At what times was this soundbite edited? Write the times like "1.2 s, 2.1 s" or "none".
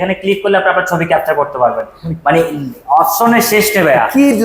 none